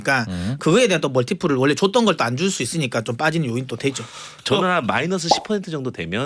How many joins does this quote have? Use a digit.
1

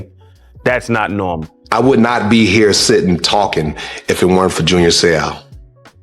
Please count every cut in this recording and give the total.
1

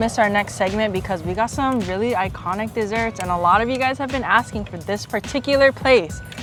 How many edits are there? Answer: 0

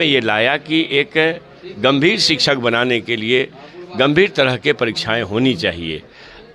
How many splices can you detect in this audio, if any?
0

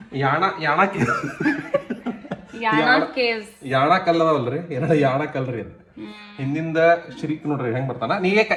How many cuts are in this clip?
0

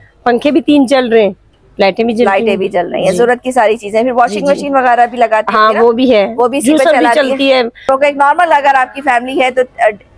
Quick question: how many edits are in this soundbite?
0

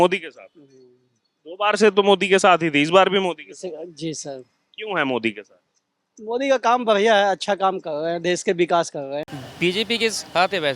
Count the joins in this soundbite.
1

